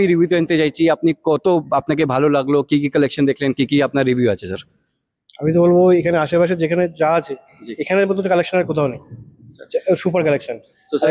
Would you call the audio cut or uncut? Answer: uncut